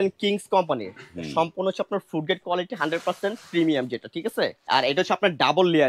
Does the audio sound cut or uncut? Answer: cut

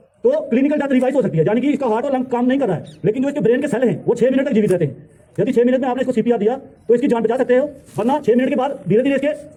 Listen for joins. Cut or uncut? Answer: uncut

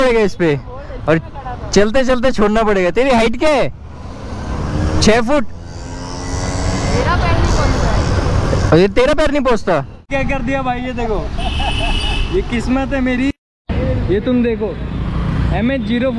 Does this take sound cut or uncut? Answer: cut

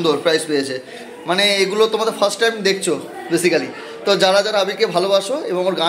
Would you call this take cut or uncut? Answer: uncut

